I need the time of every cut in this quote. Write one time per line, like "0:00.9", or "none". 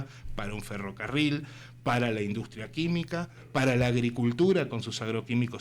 none

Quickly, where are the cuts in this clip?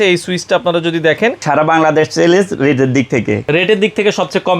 0:01.4
0:03.4

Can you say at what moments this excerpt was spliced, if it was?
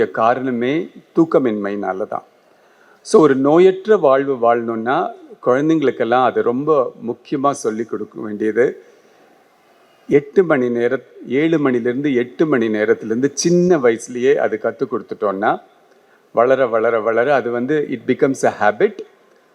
none

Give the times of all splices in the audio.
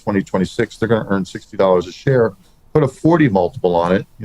0:02.5

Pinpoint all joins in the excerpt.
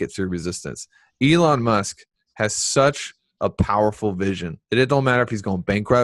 0:04.5

